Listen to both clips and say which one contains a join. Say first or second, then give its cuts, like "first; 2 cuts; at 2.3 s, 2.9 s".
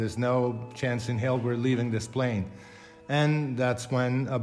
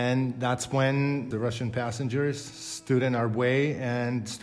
second; 1 cut; at 1.3 s